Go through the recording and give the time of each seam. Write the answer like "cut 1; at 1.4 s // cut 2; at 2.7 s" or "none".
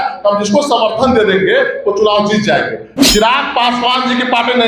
cut 1; at 2.9 s